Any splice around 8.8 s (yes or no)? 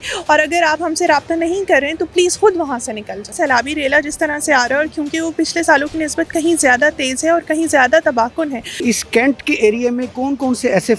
yes